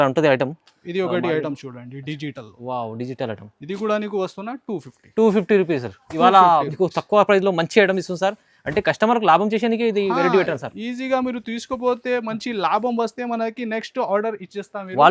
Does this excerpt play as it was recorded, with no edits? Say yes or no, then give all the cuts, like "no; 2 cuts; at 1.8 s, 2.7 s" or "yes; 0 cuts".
yes; 0 cuts